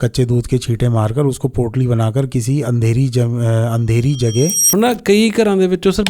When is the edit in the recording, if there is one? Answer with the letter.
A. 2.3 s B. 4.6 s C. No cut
B